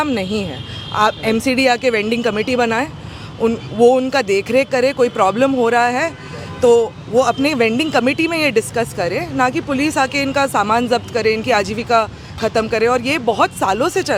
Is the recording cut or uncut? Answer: uncut